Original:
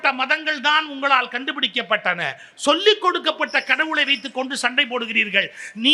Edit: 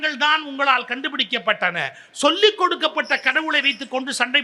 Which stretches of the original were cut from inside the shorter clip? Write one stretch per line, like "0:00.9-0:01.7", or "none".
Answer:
none

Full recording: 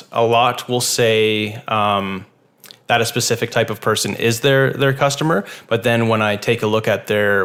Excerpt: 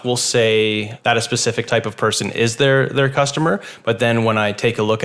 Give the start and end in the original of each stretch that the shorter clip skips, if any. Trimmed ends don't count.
0:01.6-0:02.8

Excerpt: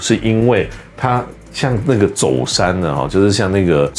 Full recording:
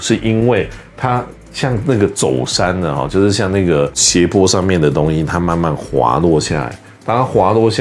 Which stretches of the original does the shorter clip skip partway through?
none

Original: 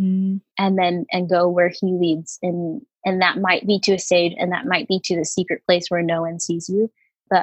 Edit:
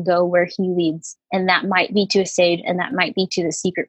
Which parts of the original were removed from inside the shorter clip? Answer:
0:02.3-0:02.8

